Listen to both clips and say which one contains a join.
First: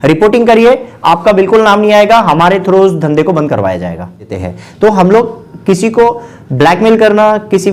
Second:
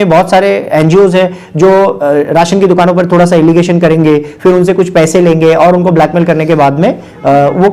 first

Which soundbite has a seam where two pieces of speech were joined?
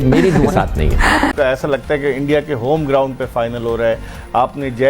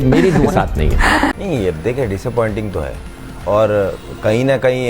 first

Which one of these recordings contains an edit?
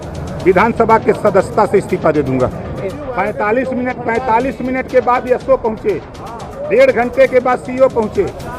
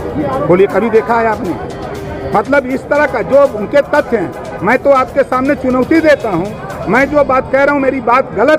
first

